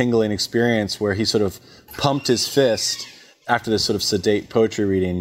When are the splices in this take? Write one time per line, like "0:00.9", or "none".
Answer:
none

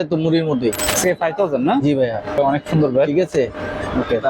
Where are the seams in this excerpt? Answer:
0:00.8
0:02.4

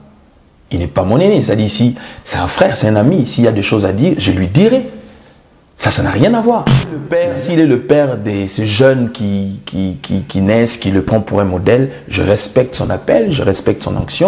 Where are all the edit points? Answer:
0:07.1

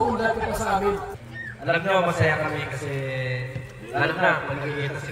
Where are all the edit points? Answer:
0:01.2

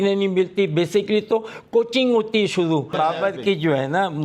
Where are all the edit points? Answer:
0:02.9

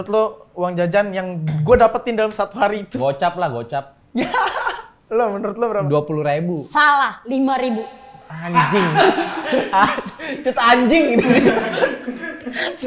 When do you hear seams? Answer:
none

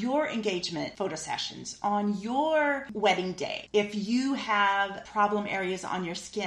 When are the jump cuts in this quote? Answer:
0:00.9
0:03.5
0:05.0

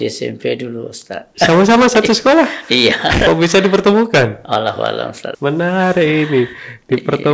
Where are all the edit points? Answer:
0:01.3
0:03.2
0:05.2

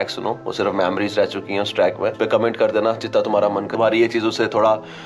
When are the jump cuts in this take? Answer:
0:02.1
0:03.7

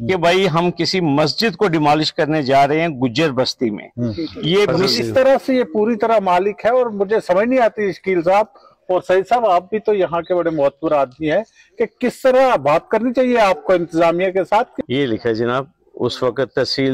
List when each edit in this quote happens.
0:04.8
0:14.7

